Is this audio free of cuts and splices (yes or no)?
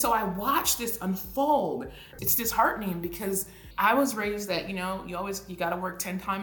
no